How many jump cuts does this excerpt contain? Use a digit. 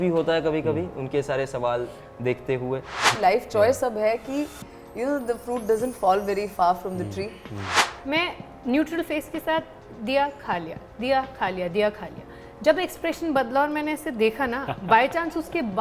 2